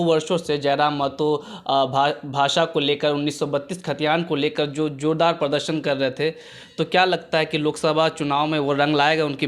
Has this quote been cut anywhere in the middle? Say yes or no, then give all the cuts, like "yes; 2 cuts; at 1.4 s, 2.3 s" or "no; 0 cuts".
no; 0 cuts